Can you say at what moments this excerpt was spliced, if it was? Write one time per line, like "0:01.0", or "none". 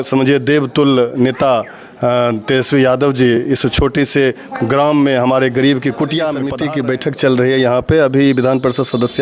0:06.5